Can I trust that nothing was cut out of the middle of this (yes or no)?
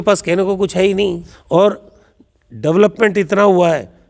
no